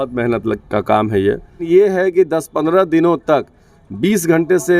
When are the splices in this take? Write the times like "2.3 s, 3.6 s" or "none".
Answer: 1.6 s